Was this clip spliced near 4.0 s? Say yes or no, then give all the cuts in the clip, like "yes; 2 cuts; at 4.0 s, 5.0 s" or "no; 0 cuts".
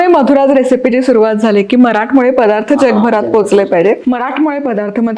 yes; 1 cut; at 4.0 s